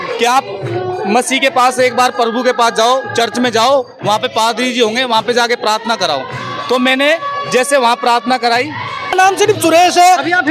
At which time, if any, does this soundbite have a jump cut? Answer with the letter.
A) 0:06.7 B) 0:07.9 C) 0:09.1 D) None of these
C